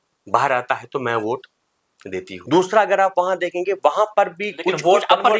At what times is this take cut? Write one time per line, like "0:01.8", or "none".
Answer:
0:02.3